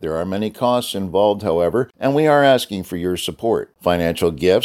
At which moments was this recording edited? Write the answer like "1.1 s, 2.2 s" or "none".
1.9 s